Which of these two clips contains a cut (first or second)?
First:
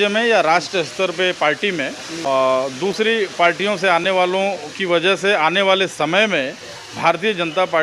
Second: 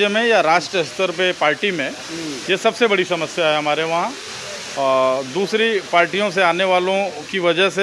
first